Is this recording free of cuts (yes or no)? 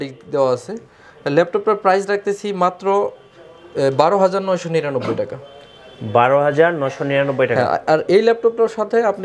yes